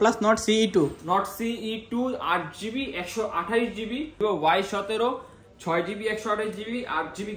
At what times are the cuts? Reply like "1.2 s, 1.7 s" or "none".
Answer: 4.1 s